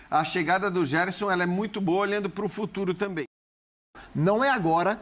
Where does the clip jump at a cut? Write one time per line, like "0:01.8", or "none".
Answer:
0:03.9